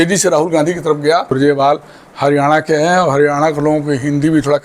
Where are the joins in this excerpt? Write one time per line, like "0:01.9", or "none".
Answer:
0:01.3